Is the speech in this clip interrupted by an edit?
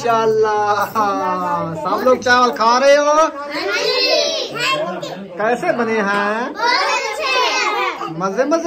no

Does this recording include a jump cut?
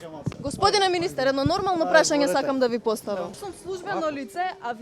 yes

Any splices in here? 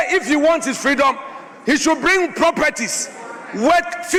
no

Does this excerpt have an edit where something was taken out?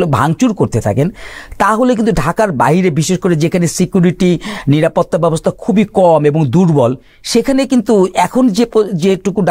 no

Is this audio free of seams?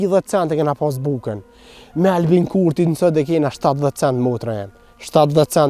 yes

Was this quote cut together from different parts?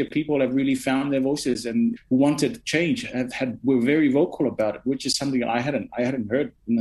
yes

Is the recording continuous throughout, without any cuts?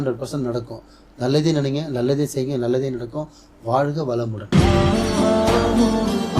no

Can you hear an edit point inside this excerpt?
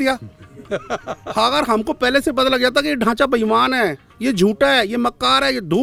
no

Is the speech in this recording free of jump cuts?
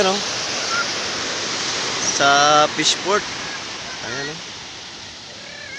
yes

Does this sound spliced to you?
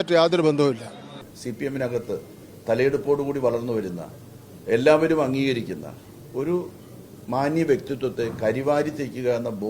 yes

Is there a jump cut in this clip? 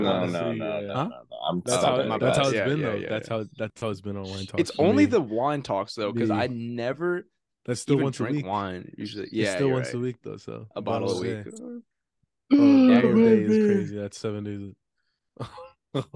no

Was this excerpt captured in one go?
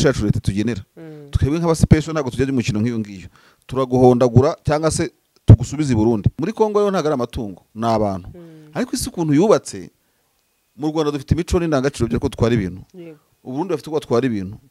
no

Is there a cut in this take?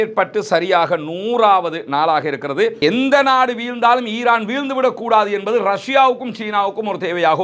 yes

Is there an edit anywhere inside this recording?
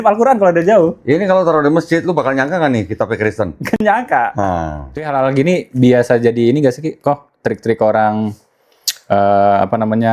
yes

